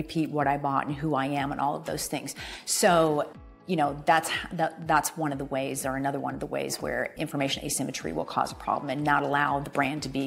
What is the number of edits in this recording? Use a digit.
1